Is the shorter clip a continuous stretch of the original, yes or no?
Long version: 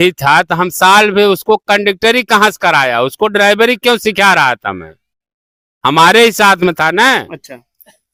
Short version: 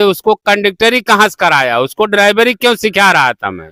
yes